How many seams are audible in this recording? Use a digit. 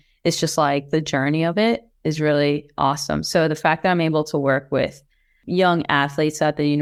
0